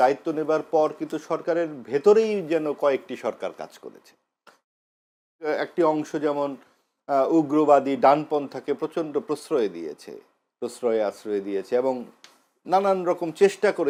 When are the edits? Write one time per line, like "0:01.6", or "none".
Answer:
none

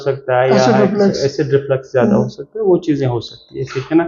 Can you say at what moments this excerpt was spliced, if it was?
none

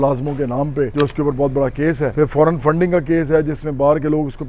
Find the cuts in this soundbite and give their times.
0:00.9
0:02.1

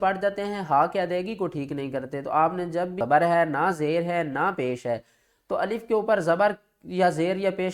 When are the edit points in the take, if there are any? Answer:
0:01.6
0:03.0

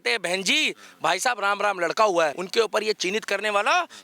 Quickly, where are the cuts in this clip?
0:02.4

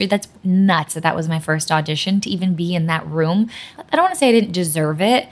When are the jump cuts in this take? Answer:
none

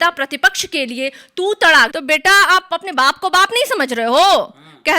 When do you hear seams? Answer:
0:01.9

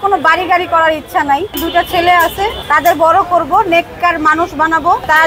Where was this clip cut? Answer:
0:01.6

